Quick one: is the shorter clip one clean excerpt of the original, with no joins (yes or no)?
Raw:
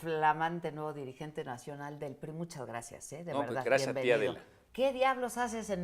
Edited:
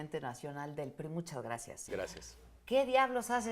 no